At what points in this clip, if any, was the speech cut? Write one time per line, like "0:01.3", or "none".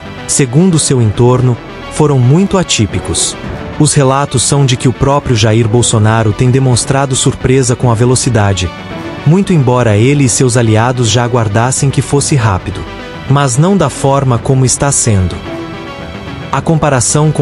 0:15.8